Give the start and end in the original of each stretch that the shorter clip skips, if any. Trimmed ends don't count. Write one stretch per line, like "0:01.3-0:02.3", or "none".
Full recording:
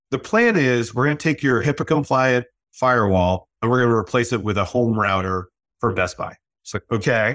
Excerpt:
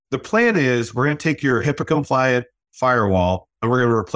none